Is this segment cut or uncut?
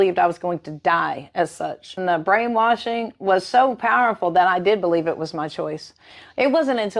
cut